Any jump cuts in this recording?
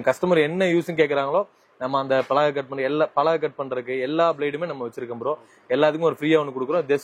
no; 0 cuts

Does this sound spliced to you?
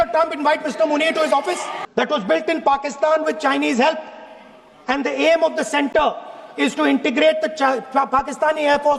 yes; 1 cut; at 1.7 s

